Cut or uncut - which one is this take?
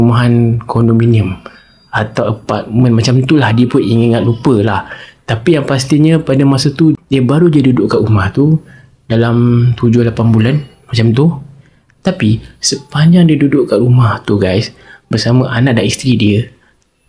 uncut